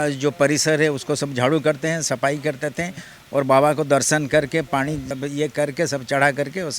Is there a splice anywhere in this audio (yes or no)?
yes